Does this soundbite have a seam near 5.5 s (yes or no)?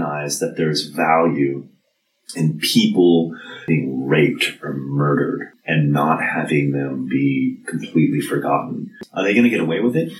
yes